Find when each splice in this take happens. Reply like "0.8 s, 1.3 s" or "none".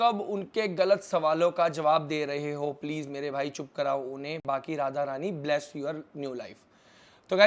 none

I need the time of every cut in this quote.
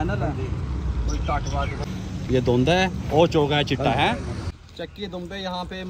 1.9 s, 4.6 s

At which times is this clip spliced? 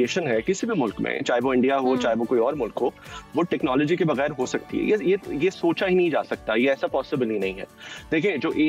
none

